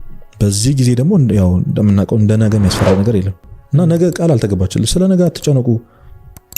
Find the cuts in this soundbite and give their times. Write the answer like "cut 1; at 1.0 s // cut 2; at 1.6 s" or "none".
cut 1; at 3.5 s